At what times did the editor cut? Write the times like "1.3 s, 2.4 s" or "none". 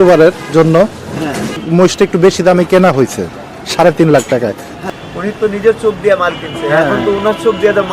1.6 s, 4.8 s